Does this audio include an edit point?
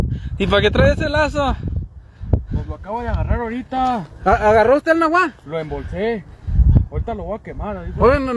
no; 0 cuts

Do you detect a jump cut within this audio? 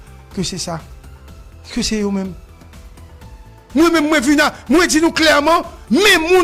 no; 0 cuts

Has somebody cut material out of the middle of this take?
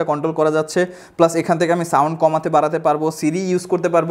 no; 0 cuts

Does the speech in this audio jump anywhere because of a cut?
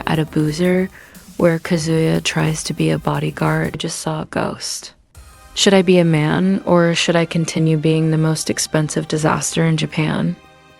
yes; 2 cuts; at 1.1 s, 3.9 s

